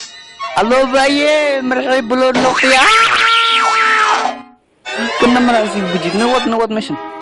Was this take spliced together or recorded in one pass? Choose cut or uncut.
uncut